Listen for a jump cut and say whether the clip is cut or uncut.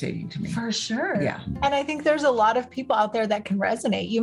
uncut